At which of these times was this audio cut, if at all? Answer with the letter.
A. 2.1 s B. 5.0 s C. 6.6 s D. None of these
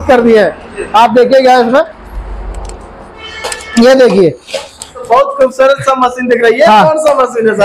B